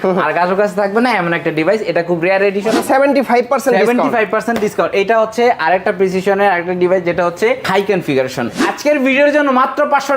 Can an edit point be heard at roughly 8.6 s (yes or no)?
yes